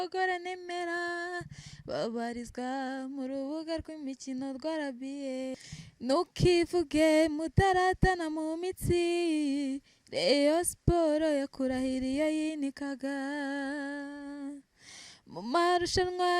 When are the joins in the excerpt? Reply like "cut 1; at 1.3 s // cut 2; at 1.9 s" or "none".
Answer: cut 1; at 5.5 s